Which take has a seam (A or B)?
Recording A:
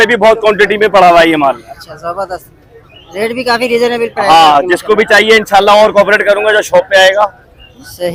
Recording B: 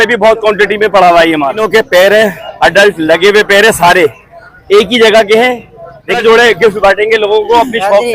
B